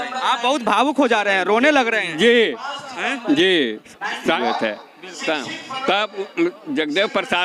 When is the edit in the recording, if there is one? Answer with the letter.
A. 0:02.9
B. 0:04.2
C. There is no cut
B